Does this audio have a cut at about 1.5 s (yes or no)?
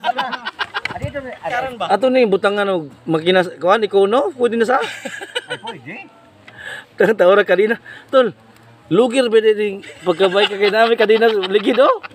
yes